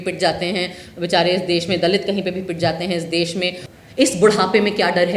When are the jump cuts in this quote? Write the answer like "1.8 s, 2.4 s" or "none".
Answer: 3.6 s